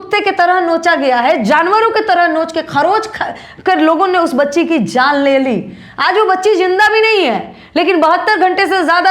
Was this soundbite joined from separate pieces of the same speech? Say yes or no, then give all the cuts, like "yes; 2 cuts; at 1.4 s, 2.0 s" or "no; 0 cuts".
no; 0 cuts